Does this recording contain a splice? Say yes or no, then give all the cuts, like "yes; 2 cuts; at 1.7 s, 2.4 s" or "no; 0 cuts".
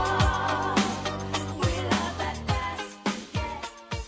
no; 0 cuts